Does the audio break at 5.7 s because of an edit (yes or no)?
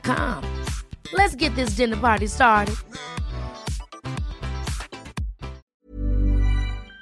yes